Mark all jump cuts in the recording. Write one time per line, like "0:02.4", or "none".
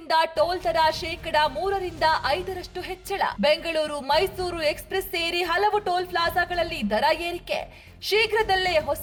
none